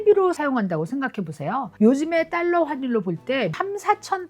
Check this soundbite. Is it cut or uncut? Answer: cut